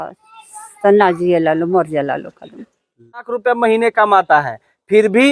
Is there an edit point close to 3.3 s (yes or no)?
yes